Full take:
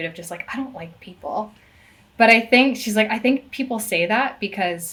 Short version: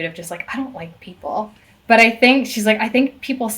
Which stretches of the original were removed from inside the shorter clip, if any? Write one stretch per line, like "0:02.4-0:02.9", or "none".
0:01.7-0:02.0